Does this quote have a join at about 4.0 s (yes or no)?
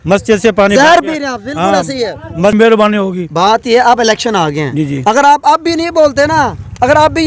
no